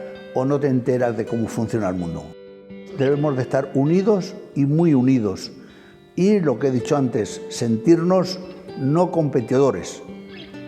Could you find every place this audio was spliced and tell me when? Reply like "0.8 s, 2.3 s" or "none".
2.8 s